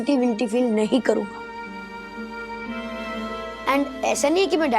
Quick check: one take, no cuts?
yes; 0 cuts

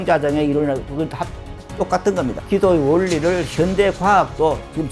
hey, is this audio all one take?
no; 1 cut; at 2.4 s

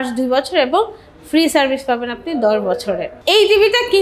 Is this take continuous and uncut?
no; 1 cut; at 3.1 s

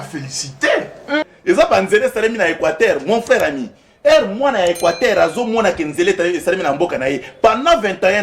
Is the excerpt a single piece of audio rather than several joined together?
no; 1 cut; at 1.3 s

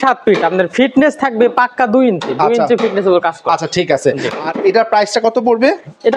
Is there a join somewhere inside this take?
no; 0 cuts

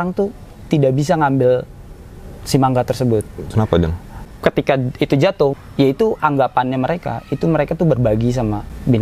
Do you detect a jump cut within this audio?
yes; 2 cuts; at 4.3 s, 5.5 s

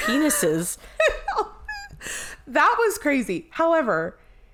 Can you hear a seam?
no; 0 cuts

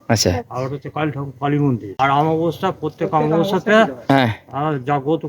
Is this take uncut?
no; 1 cut; at 1.9 s

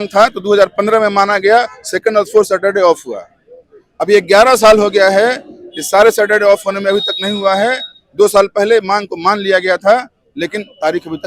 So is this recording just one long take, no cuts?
yes; 0 cuts

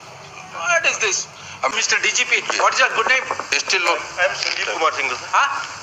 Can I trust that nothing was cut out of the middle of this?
no; 1 cut; at 1.6 s

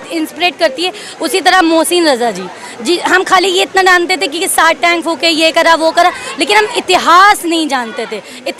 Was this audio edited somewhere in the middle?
no; 0 cuts

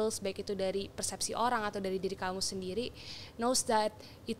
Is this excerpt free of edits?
yes; 0 cuts

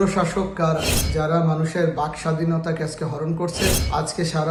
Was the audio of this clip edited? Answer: no; 0 cuts

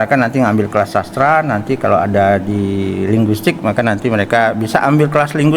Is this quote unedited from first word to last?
yes; 0 cuts

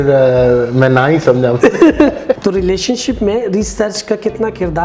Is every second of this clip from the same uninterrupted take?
no; 1 cut; at 2.4 s

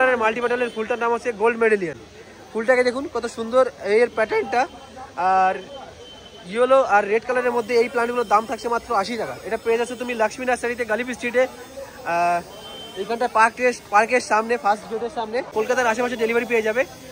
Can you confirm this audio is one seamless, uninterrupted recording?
yes; 0 cuts

